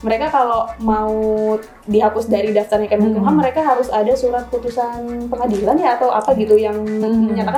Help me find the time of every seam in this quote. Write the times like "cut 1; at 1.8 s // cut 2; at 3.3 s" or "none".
none